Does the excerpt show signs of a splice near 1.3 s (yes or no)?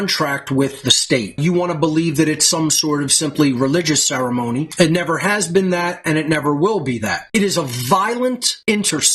yes